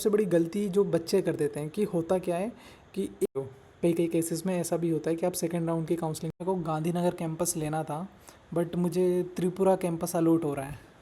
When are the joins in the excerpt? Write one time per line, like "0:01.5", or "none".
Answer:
0:03.3
0:06.4